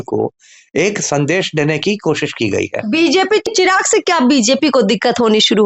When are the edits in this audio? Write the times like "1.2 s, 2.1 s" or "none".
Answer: 3.5 s